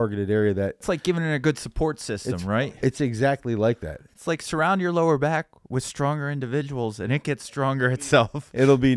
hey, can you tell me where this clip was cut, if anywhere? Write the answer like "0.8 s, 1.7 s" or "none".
0.8 s, 2.6 s